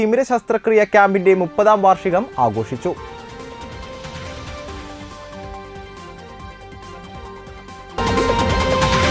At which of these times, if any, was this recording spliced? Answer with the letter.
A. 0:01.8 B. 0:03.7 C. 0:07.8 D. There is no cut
C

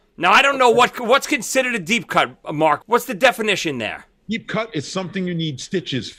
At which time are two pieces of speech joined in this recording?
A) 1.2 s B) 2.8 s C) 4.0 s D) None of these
B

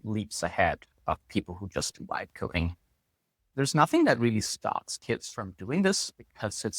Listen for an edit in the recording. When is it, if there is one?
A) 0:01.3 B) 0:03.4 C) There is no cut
B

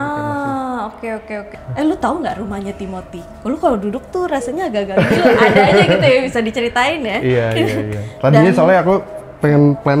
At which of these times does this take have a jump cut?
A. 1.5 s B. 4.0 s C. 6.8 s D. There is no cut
A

